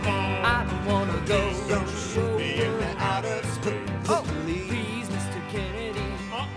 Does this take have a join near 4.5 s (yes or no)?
no